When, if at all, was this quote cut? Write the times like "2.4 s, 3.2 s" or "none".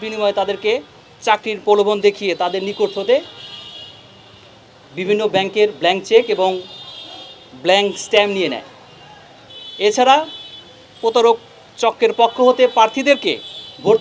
none